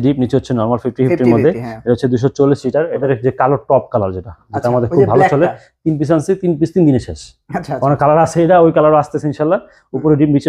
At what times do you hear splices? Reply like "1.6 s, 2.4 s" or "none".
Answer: 3.0 s